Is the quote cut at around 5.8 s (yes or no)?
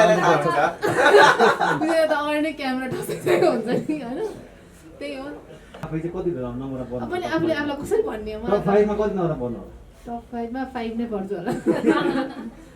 yes